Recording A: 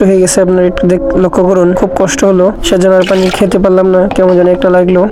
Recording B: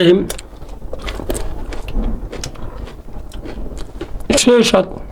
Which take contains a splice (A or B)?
B